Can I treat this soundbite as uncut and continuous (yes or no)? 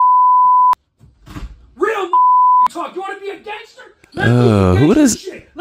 yes